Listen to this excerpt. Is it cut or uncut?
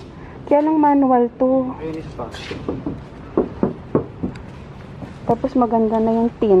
cut